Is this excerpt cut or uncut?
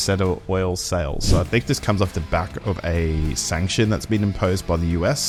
uncut